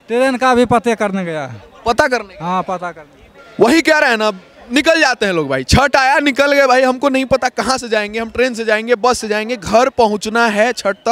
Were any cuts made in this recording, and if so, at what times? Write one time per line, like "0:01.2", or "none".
none